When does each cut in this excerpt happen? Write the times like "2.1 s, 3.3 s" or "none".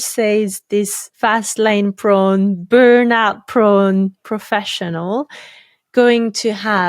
1.1 s